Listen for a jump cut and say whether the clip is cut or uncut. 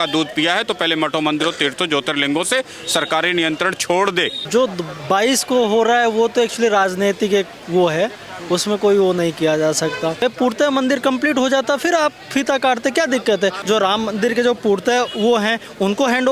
cut